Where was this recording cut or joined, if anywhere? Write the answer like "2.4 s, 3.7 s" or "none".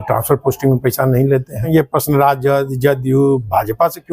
1.6 s